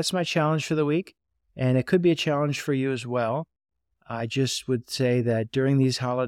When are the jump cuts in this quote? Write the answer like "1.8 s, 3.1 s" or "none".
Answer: none